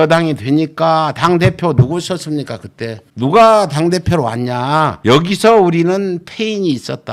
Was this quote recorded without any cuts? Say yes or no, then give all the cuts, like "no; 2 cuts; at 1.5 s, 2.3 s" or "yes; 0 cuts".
yes; 0 cuts